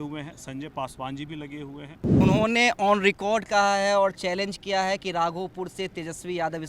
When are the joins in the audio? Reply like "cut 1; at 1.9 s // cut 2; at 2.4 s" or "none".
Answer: cut 1; at 2.2 s